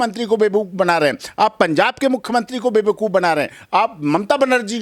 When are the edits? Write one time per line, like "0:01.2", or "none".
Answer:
none